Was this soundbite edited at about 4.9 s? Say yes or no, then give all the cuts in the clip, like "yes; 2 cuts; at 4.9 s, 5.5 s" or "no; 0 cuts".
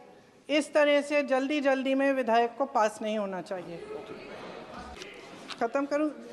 yes; 1 cut; at 4.9 s